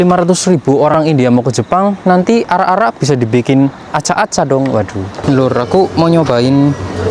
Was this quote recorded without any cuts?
no; 2 cuts; at 0.9 s, 5.1 s

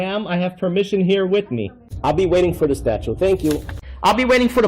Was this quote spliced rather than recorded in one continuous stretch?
yes; 1 cut; at 1.8 s

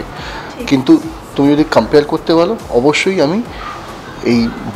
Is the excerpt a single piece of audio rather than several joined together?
yes; 0 cuts

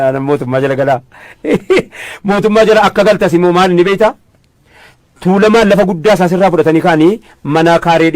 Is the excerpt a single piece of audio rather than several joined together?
no; 1 cut; at 2.9 s

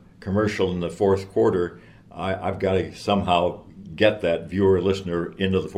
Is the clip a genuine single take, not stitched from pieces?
yes; 0 cuts

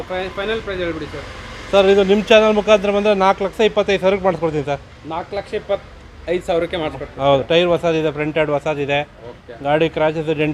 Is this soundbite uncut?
yes; 0 cuts

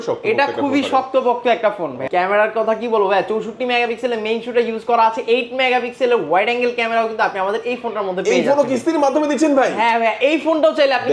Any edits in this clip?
yes; 1 cut; at 2.0 s

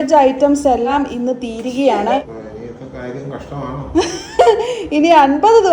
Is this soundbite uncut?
no; 2 cuts; at 0.9 s, 2.3 s

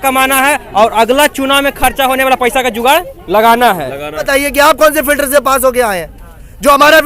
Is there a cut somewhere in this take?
yes; 1 cut; at 4.3 s

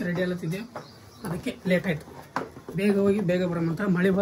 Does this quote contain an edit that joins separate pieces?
no; 0 cuts

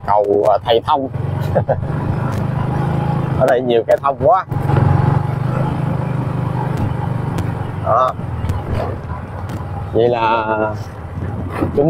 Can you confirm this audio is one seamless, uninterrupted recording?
yes; 0 cuts

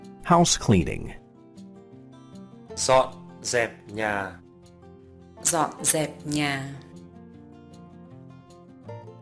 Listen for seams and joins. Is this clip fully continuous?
no; 2 cuts; at 1.1 s, 2.8 s

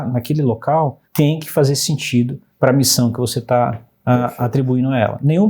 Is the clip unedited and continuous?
no; 2 cuts; at 1.0 s, 2.4 s

